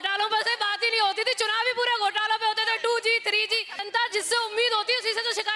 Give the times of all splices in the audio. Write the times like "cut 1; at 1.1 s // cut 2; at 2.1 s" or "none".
cut 1; at 3.7 s